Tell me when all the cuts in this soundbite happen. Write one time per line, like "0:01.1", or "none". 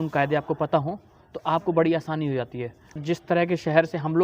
0:03.0